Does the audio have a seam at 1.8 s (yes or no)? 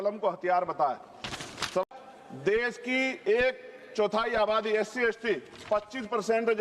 yes